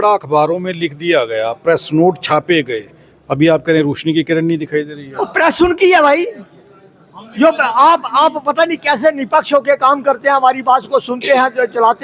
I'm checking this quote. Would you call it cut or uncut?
uncut